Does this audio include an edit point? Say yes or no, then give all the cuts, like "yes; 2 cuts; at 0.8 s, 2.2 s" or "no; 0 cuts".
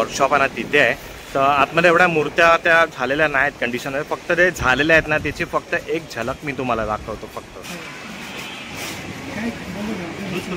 no; 0 cuts